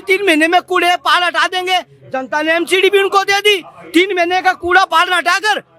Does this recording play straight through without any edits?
yes; 0 cuts

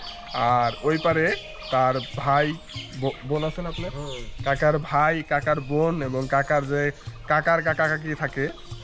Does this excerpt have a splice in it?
no; 0 cuts

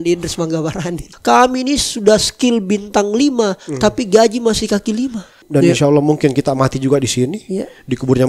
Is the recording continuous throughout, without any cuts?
no; 2 cuts; at 1.1 s, 5.4 s

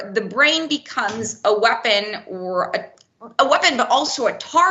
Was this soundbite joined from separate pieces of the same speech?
no; 0 cuts

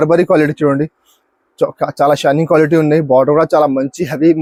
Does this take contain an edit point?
no; 0 cuts

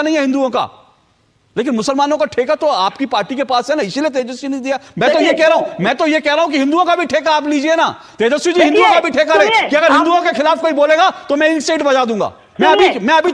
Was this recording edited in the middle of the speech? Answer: no; 0 cuts

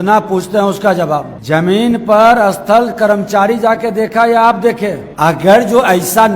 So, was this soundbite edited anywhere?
yes; 2 cuts; at 1.3 s, 5.0 s

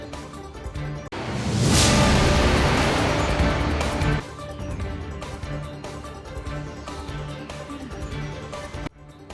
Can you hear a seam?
yes; 1 cut; at 0.9 s

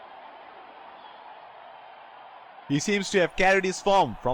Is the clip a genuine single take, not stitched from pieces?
no; 1 cut; at 2.6 s

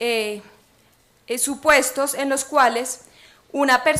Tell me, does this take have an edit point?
yes; 1 cut; at 2.4 s

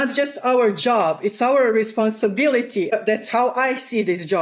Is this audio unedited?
yes; 0 cuts

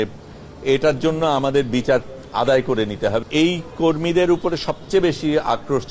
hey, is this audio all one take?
no; 1 cut; at 3.2 s

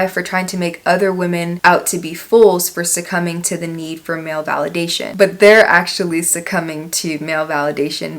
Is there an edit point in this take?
yes; 1 cut; at 5.1 s

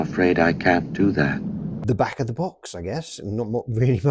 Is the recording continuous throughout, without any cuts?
no; 1 cut; at 1.8 s

